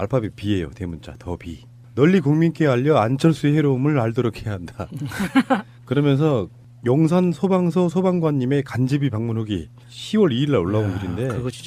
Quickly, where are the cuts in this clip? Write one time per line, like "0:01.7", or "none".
none